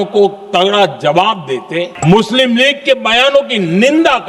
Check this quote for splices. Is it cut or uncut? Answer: cut